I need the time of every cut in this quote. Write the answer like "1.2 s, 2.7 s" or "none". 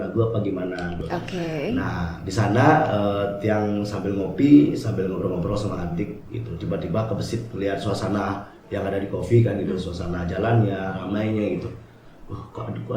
1.0 s